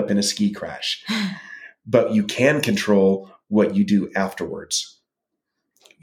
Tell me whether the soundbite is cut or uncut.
uncut